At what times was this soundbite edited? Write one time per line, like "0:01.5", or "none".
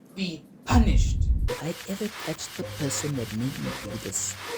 0:01.4

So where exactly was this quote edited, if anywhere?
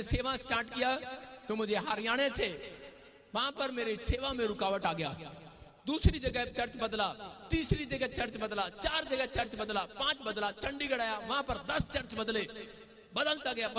none

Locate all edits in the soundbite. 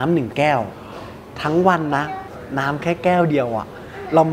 0:02.3

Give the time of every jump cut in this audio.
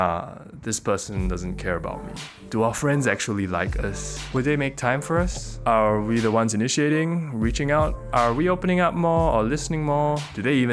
0:02.5
0:08.0

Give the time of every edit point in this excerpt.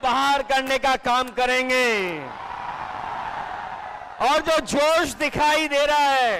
none

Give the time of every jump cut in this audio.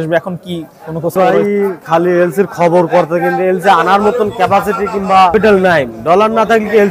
0:01.1
0:05.3

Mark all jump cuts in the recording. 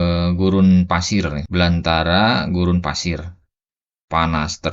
0:01.4

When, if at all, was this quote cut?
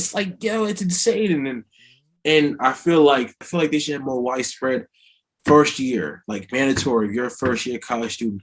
0:03.5

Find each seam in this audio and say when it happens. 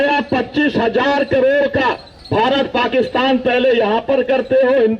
0:02.1

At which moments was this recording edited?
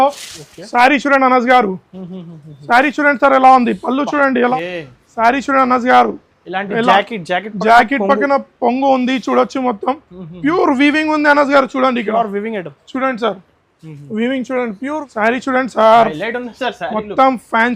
0:04.5
0:15.0

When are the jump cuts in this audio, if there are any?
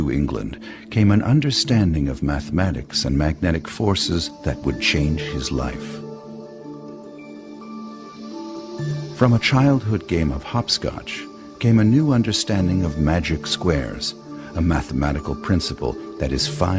0:03.5

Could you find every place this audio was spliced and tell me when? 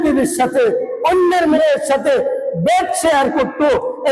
0:01.5

